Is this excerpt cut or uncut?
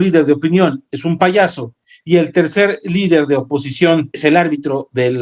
cut